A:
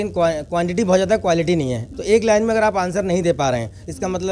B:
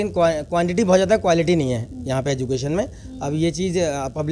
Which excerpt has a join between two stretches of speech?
A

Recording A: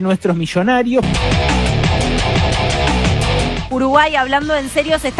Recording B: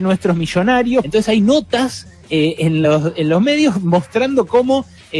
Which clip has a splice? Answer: A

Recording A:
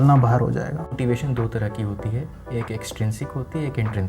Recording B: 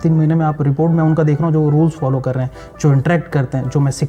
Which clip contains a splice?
A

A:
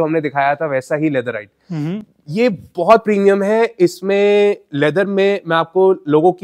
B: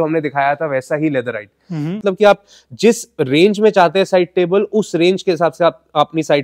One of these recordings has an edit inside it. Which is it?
B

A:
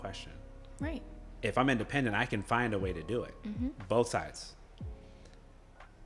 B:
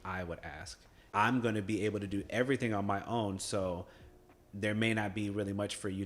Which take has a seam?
B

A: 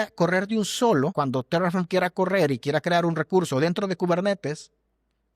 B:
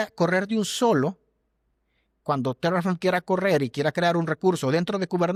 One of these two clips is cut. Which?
A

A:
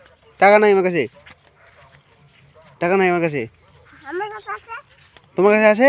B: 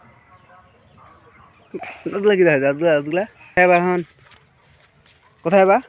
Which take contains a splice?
B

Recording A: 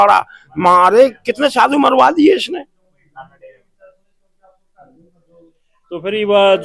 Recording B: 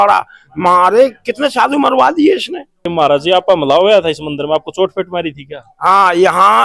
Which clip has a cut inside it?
B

